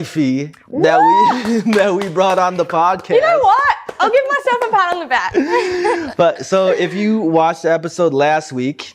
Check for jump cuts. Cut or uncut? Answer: uncut